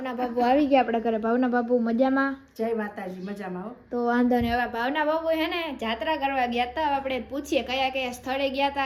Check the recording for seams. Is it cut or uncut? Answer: uncut